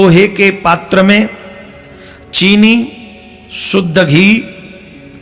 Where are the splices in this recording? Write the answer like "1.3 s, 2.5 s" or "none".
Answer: none